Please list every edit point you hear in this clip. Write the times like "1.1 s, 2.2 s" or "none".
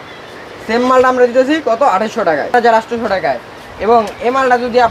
2.5 s